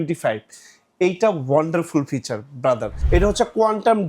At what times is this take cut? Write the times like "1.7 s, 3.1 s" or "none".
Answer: 2.9 s